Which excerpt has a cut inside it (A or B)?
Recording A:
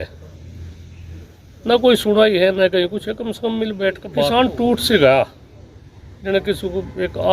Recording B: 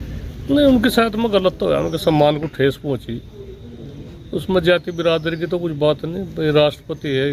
A